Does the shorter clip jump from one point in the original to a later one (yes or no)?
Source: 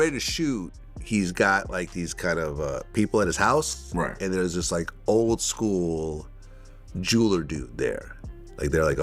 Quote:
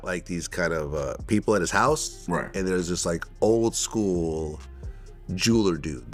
no